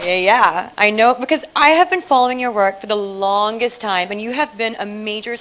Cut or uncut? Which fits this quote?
uncut